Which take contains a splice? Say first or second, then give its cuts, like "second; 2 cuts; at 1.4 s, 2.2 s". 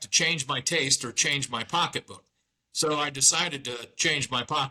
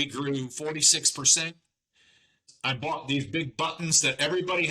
second; 1 cut; at 2.5 s